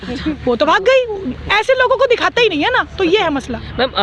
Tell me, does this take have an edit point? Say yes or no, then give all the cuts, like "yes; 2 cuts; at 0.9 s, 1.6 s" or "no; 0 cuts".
no; 0 cuts